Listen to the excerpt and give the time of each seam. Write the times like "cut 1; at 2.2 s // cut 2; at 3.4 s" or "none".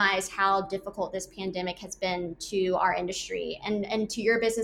none

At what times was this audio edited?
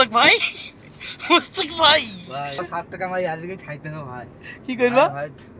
cut 1; at 2.6 s

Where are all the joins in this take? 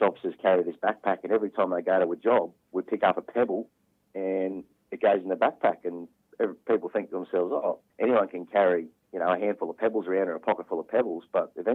none

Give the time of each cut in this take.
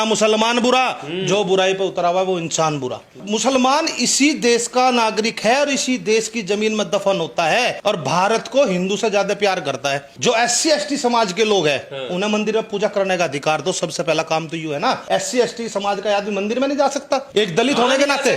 cut 1; at 3.2 s // cut 2; at 7.8 s // cut 3; at 10.1 s // cut 4; at 15.0 s // cut 5; at 17.3 s

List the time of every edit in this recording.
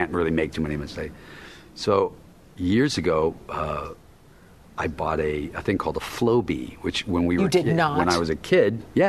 none

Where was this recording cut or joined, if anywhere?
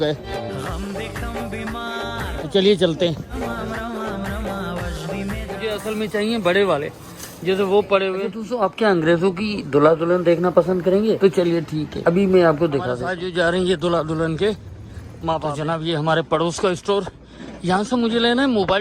cut 1; at 5.7 s // cut 2; at 8.4 s // cut 3; at 13.0 s // cut 4; at 15.6 s

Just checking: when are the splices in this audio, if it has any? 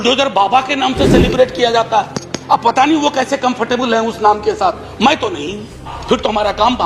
cut 1; at 1.9 s // cut 2; at 5.9 s

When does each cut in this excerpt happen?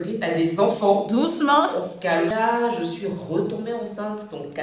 cut 1; at 2.3 s

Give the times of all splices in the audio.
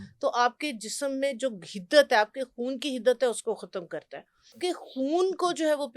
cut 1; at 4.6 s

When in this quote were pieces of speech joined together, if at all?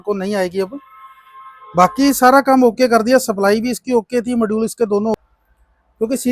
cut 1; at 5.1 s

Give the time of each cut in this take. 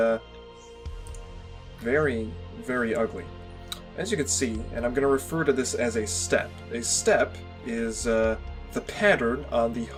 none

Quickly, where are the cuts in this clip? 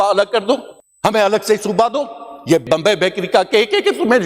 cut 1; at 2.6 s

